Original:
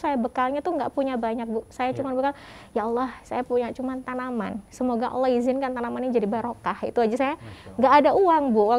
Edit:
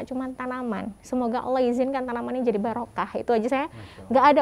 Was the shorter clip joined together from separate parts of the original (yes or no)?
no